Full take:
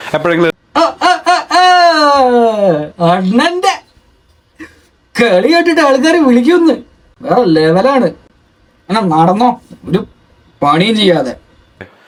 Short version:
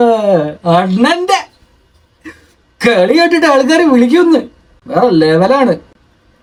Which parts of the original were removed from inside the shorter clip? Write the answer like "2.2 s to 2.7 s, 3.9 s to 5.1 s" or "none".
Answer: none